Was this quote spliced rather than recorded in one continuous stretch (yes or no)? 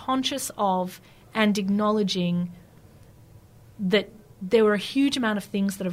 no